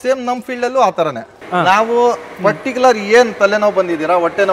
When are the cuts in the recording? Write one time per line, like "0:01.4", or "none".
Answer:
0:01.5